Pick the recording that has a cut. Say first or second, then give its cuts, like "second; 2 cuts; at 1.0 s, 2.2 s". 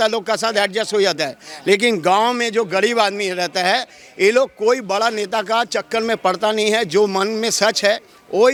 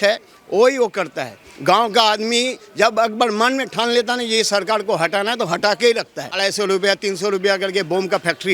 second; 1 cut; at 6.3 s